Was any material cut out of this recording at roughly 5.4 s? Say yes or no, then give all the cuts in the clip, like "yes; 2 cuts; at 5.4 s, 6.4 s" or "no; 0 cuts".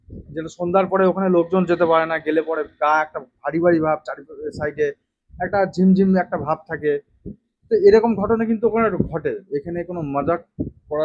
no; 1 cut; at 9.4 s